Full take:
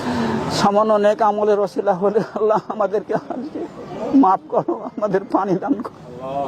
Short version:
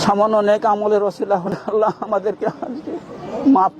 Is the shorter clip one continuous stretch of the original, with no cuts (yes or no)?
no